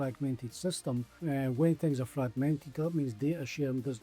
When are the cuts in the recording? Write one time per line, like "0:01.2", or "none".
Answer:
0:01.1

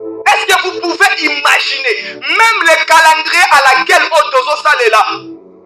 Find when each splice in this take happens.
none

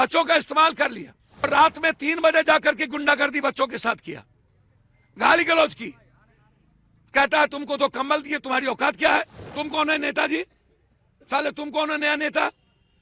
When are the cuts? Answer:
0:01.4
0:09.4

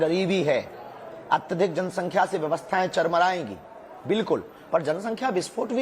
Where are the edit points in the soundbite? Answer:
0:02.4

